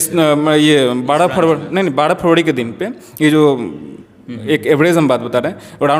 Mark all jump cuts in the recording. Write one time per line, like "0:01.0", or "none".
none